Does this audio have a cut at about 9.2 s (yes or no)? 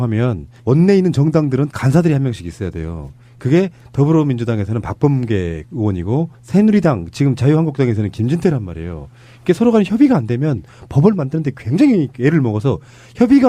no